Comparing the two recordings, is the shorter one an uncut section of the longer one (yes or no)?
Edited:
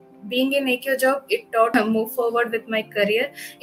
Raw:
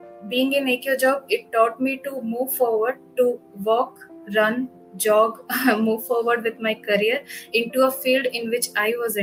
no